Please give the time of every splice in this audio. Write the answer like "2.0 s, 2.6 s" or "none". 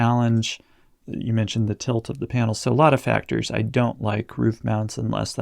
0.9 s